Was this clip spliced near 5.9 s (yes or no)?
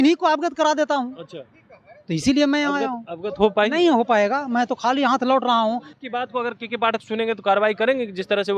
yes